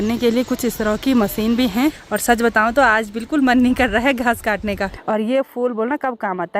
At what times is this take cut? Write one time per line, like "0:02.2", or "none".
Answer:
0:02.1
0:04.9